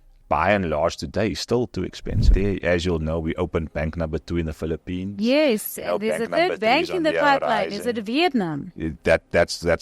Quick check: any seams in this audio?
yes; 1 cut; at 2.3 s

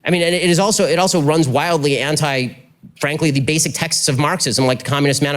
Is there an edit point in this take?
yes; 1 cut; at 1.0 s

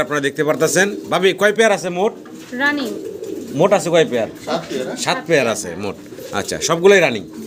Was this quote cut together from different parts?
no; 0 cuts

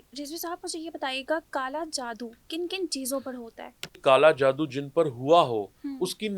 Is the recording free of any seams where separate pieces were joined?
no; 1 cut; at 4.0 s

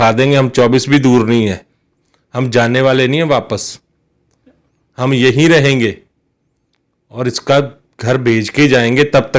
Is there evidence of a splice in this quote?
no; 0 cuts

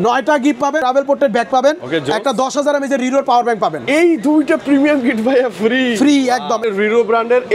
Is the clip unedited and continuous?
no; 2 cuts; at 0.8 s, 6.6 s

